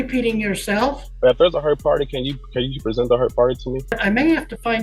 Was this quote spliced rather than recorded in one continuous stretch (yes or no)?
yes